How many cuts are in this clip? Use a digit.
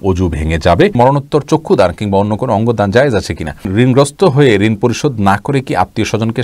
2